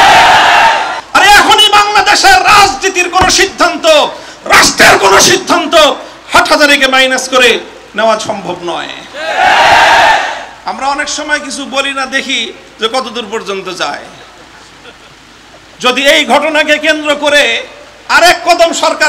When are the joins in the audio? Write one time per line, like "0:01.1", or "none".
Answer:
0:01.0